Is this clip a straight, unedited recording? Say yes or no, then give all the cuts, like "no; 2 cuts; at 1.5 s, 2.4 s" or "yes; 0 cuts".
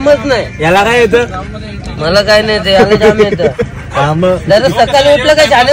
yes; 0 cuts